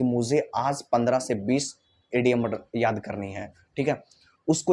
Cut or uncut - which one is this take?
uncut